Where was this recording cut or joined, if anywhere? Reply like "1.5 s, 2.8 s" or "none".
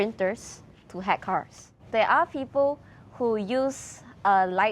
1.9 s